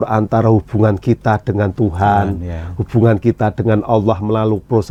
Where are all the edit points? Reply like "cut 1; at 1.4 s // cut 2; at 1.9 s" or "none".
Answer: none